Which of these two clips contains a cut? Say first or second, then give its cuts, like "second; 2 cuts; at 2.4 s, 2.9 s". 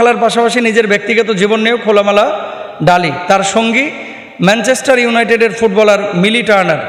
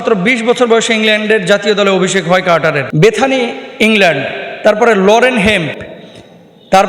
second; 1 cut; at 2.9 s